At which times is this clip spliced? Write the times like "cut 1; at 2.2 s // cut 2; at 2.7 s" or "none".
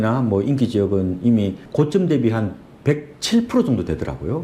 cut 1; at 1.6 s